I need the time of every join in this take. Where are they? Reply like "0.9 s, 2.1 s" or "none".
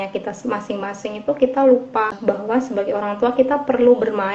2.2 s